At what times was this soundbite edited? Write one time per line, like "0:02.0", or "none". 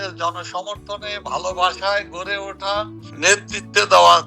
0:03.0